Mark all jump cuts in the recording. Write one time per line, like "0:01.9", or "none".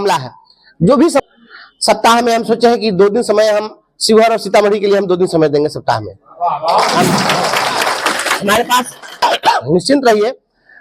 0:01.2
0:09.2